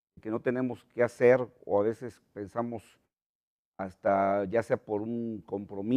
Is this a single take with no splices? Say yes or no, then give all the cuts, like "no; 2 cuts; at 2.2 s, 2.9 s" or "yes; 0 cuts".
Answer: no; 1 cut; at 3.9 s